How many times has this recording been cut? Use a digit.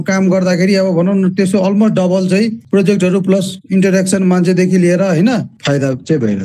2